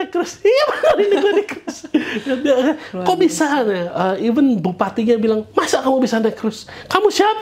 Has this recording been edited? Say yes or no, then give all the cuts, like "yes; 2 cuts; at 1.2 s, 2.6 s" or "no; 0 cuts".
no; 0 cuts